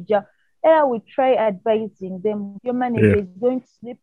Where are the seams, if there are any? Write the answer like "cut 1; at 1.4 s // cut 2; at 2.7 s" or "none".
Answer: cut 1; at 2.5 s